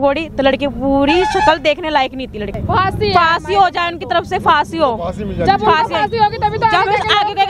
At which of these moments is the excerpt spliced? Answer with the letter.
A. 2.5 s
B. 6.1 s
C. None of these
A